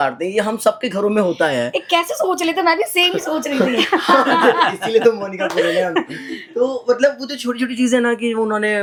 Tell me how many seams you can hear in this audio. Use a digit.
0